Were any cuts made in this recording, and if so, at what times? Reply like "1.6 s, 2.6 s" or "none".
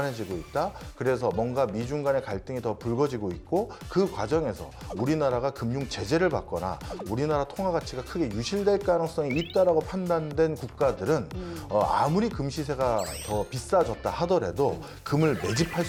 none